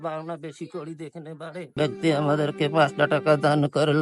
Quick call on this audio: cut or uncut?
cut